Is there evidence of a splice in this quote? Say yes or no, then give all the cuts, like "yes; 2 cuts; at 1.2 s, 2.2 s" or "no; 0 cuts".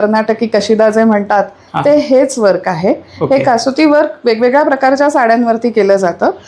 no; 0 cuts